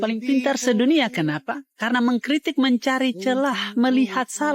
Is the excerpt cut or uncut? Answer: uncut